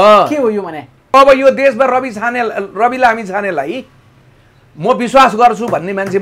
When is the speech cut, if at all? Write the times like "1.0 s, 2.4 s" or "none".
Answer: 1.1 s